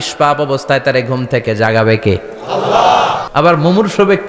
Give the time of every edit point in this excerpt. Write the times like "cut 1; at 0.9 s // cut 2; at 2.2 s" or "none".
cut 1; at 3.2 s